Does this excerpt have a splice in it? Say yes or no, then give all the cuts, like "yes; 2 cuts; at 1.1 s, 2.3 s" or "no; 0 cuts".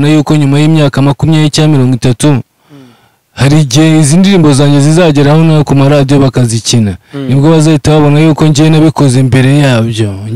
no; 0 cuts